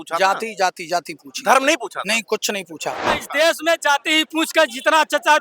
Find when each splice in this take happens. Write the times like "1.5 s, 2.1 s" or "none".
3.0 s